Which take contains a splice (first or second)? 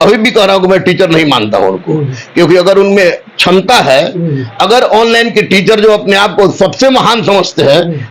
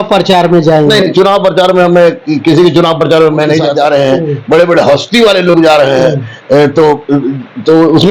second